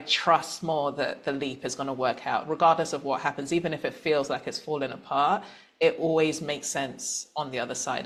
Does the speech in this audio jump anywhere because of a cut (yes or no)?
no